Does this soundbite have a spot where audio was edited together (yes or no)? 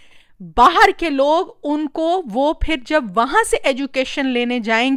no